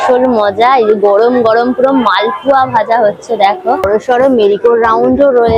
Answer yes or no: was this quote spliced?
yes